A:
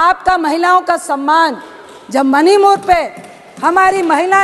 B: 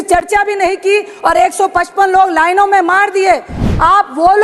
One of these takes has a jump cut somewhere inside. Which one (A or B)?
B